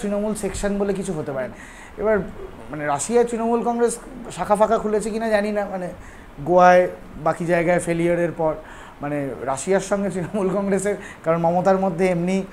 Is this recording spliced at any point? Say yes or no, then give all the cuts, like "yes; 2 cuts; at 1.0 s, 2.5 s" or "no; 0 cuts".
yes; 1 cut; at 1.7 s